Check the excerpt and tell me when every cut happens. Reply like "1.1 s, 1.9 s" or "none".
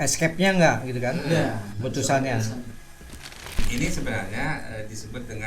3.5 s